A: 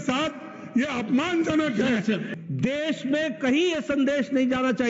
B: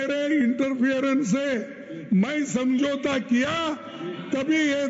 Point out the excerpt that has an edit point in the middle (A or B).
A